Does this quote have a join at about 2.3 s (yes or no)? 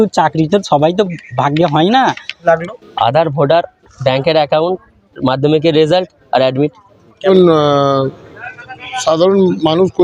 yes